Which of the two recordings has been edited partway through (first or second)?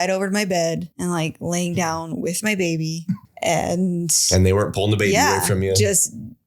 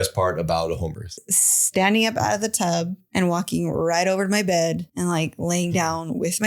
second